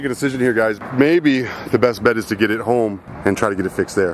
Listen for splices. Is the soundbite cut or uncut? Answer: cut